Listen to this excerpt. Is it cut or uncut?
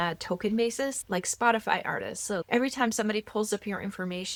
uncut